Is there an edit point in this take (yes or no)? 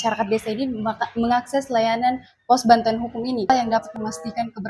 yes